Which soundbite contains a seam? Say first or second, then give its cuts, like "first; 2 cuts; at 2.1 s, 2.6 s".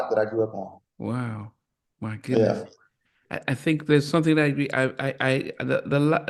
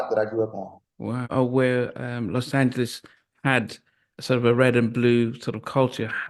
second; 1 cut; at 1.3 s